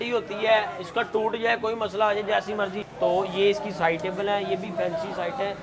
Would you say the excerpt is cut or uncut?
cut